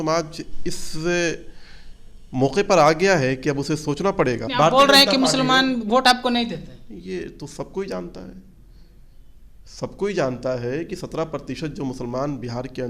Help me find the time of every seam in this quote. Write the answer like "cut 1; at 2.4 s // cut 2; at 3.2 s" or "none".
cut 1; at 4.5 s